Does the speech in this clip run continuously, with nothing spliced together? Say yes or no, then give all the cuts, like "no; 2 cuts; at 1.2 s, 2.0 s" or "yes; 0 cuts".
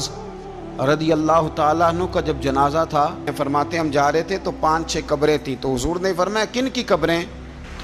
no; 1 cut; at 3.3 s